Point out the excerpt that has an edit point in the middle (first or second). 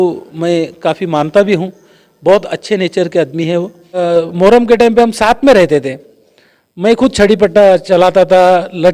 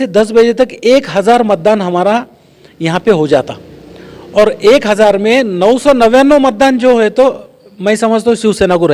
first